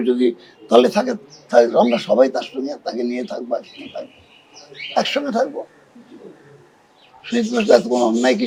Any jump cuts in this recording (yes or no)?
no